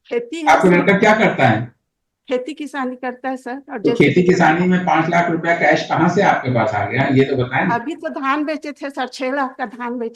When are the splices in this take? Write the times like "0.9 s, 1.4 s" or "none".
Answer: none